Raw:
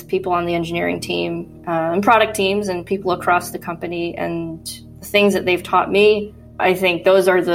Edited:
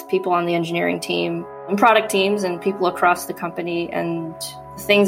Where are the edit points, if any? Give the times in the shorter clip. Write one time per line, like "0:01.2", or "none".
0:01.7

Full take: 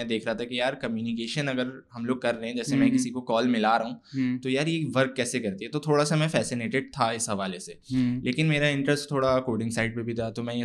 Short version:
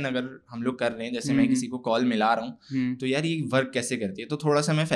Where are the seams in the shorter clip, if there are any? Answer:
none

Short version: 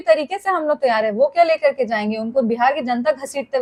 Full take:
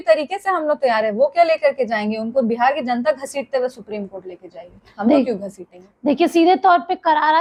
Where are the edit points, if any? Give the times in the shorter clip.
none

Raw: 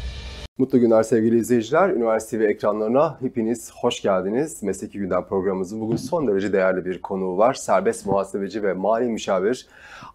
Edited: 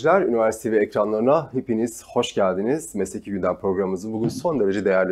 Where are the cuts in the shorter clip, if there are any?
none

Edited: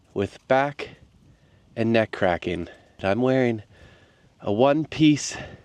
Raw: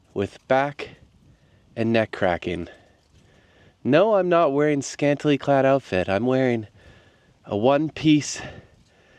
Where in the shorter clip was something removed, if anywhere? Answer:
0:03.0

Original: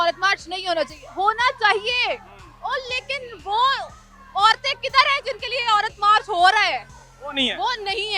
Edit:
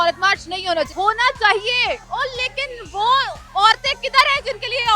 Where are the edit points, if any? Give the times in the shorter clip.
0:00.9
0:02.0
0:03.4

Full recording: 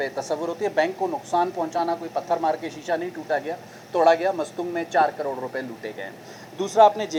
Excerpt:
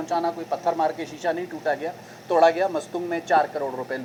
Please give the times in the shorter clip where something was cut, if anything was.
none

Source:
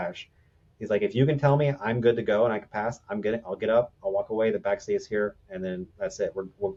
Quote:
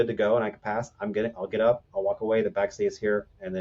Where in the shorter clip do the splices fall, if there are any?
none

